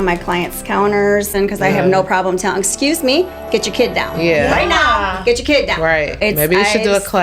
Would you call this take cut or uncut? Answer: cut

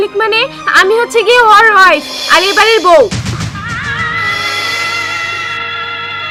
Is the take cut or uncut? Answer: uncut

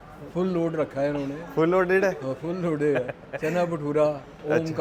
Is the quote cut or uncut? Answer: uncut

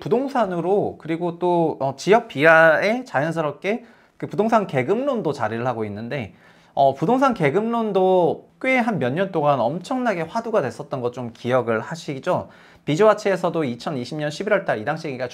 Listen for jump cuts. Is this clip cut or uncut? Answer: uncut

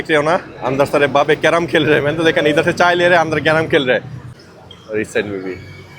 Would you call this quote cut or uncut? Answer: cut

